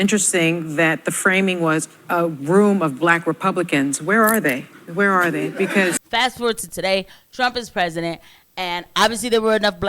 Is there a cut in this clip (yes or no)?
yes